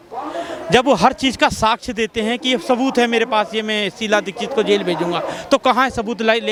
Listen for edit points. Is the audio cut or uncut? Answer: uncut